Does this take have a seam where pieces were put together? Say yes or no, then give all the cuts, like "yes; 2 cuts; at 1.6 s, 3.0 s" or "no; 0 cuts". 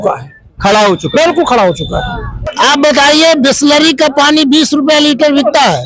yes; 1 cut; at 2.4 s